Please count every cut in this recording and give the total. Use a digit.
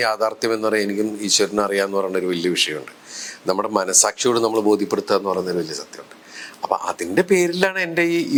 0